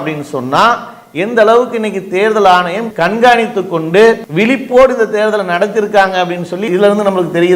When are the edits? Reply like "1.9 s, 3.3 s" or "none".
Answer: 6.6 s